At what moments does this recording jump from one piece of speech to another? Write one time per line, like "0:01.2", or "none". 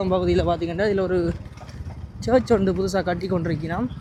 none